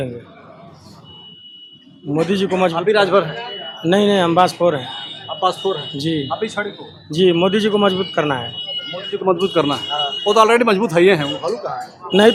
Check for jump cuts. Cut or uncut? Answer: uncut